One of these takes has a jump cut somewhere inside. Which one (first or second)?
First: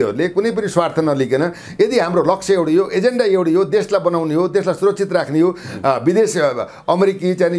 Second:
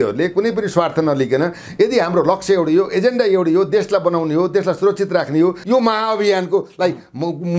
second